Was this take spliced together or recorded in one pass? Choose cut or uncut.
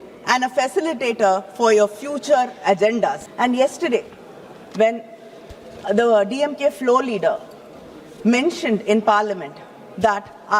cut